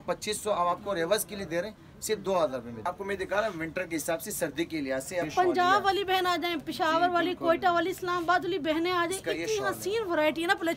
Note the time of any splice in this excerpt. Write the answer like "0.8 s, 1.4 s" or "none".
2.9 s, 5.3 s

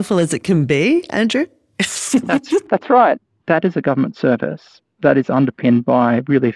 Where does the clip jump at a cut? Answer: 3.3 s

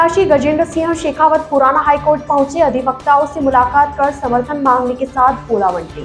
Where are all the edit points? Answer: none

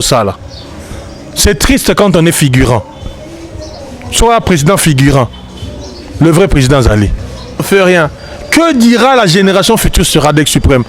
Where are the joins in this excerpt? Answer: 7.6 s

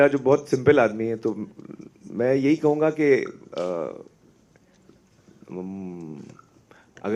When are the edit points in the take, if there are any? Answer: none

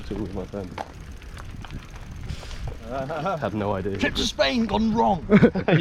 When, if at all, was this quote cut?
1.0 s, 2.8 s

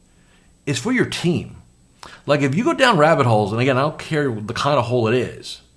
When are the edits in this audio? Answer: none

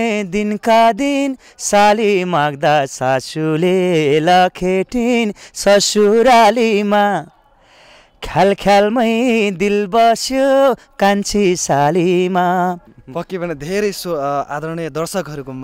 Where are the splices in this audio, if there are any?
none

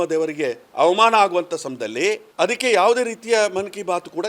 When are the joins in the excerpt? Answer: 2.2 s

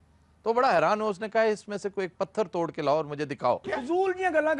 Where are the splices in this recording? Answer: 3.6 s

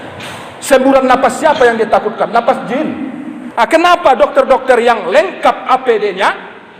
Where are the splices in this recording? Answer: 3.4 s

